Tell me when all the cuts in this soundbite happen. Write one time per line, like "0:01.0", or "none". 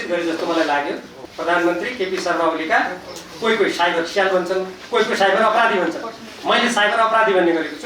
0:01.1